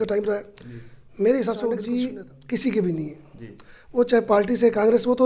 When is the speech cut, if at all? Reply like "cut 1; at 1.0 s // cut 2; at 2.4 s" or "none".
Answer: cut 1; at 1.8 s